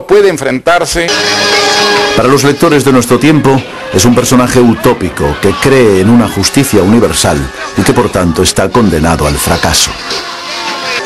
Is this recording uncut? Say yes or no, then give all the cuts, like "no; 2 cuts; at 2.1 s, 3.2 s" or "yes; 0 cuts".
yes; 0 cuts